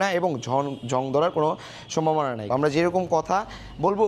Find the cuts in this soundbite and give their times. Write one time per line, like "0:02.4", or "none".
0:02.5